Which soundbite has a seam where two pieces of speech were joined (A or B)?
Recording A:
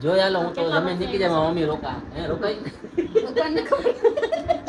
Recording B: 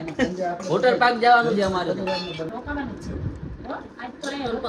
B